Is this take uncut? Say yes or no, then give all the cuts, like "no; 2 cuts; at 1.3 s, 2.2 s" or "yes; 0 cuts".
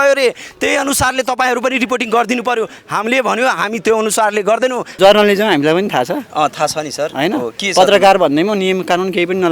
no; 1 cut; at 4.9 s